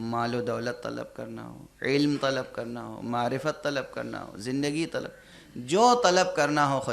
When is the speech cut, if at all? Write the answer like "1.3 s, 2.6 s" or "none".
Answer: none